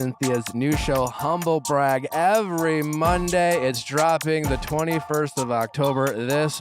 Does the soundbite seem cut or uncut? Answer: uncut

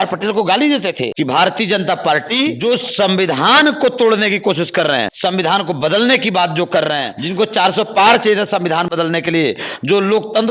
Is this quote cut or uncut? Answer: cut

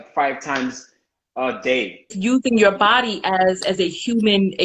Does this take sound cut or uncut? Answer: cut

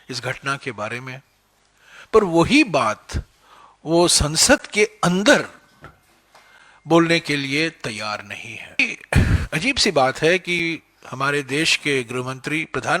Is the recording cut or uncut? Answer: cut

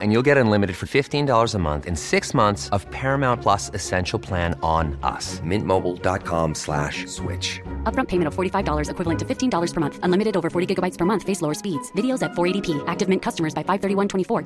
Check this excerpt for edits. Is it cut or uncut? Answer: uncut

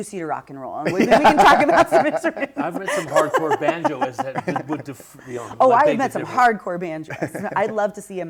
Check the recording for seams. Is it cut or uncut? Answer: uncut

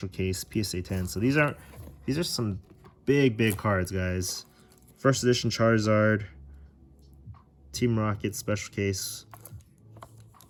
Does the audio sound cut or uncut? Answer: uncut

